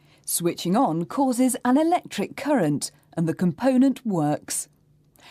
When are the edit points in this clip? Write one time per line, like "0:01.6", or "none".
0:01.0